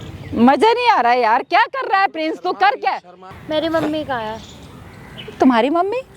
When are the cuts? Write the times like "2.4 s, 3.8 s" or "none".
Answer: 3.4 s